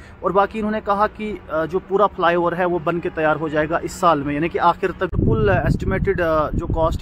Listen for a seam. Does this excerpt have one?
yes; 1 cut; at 5.2 s

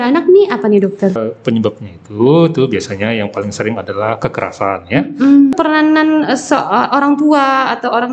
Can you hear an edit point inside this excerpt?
yes; 2 cuts; at 1.2 s, 5.5 s

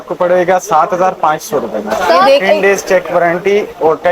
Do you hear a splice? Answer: yes; 1 cut; at 2.3 s

